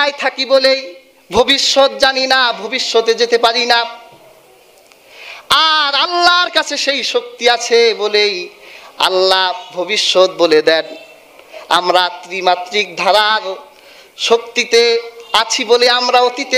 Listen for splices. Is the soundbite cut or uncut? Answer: uncut